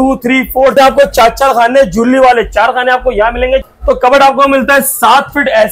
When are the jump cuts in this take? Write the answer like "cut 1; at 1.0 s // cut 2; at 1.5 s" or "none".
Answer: cut 1; at 0.7 s // cut 2; at 3.6 s